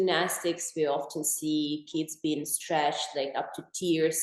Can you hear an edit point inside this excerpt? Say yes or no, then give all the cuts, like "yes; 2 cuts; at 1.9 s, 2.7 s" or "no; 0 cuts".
no; 0 cuts